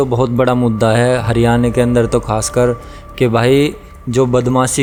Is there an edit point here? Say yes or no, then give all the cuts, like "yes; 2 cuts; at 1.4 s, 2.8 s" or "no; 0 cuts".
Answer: no; 0 cuts